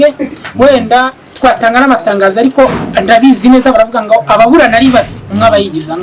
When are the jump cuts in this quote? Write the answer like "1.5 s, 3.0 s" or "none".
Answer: none

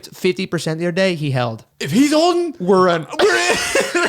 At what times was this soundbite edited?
1.7 s

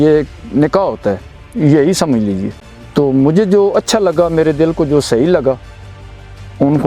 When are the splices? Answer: 2.5 s

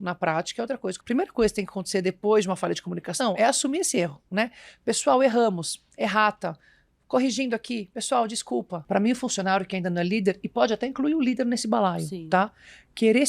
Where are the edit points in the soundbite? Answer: 1.0 s, 8.8 s

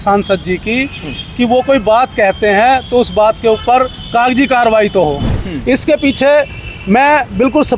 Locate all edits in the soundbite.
5.4 s

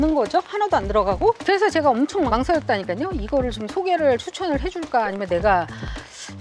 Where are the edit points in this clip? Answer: 1.4 s

